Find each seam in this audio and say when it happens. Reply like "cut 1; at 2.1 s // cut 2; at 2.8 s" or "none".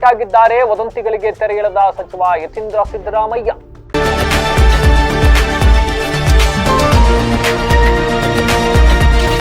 cut 1; at 3.7 s